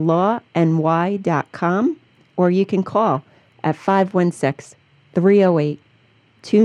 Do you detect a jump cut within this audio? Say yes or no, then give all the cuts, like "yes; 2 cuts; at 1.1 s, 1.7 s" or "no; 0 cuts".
no; 0 cuts